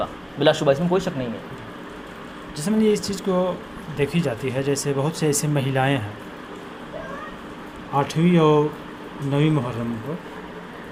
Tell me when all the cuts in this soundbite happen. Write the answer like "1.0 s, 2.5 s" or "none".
none

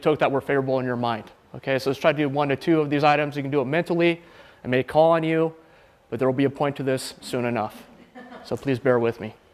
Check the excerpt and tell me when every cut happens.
4.7 s

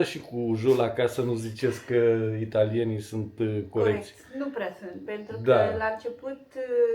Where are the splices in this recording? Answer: none

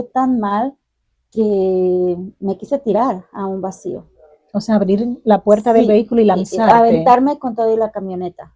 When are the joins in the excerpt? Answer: none

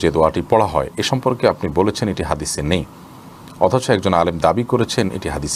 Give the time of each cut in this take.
none

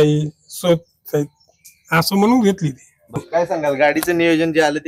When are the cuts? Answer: 3.2 s

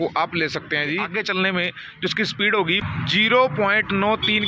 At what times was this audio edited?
1.1 s, 2.8 s

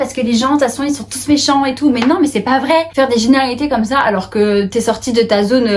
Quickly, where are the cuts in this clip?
2.9 s

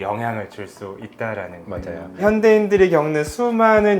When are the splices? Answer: 2.2 s

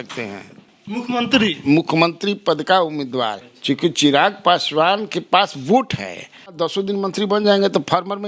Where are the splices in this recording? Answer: 3.4 s, 6.6 s

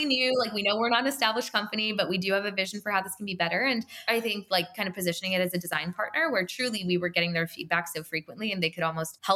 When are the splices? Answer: 3.9 s

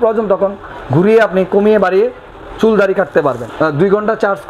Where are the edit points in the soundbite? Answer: 3.5 s

